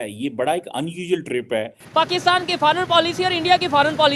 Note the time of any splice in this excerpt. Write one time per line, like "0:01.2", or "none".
0:01.8